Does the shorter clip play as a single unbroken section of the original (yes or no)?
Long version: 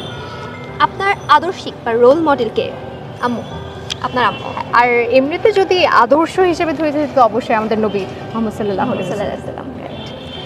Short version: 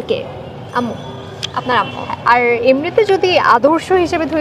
yes